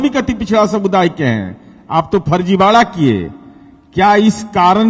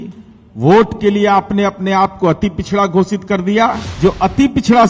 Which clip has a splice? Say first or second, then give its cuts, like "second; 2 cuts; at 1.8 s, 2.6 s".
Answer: second; 1 cut; at 3.8 s